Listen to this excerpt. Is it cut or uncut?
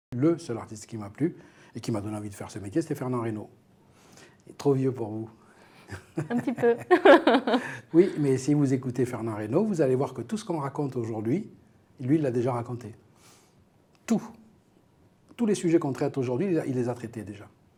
uncut